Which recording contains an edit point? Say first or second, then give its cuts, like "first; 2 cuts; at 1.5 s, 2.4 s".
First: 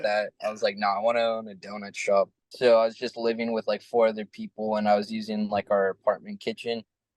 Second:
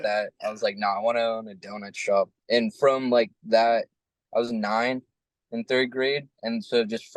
first; 1 cut; at 2.4 s